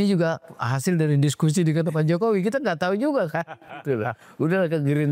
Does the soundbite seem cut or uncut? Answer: uncut